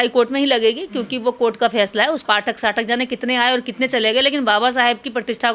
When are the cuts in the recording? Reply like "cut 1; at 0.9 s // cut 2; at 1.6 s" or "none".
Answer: none